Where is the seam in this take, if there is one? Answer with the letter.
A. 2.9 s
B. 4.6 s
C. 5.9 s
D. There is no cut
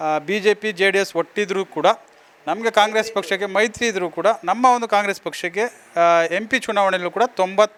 D